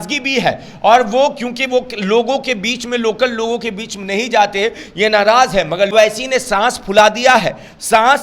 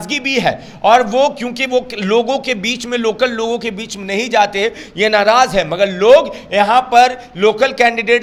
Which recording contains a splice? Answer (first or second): first